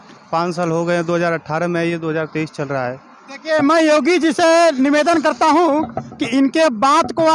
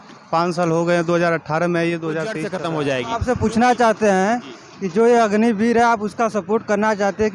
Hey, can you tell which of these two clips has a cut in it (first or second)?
second